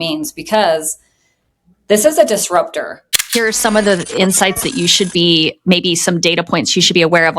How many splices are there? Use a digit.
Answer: 1